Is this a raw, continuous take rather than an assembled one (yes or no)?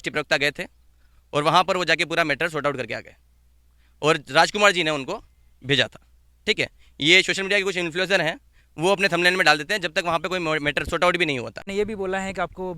no